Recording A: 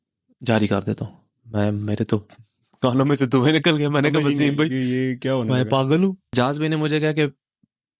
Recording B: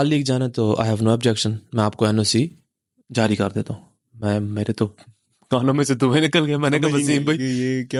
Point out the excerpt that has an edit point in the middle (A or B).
A